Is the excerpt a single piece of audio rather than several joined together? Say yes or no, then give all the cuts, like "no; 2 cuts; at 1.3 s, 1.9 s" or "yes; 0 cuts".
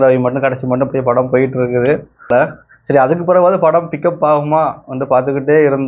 no; 1 cut; at 2.3 s